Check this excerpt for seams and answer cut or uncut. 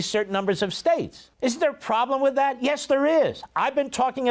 cut